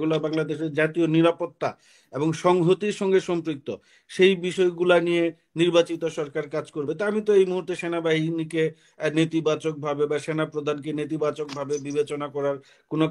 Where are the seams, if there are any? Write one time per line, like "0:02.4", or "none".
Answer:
none